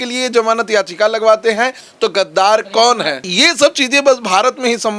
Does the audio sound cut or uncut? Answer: cut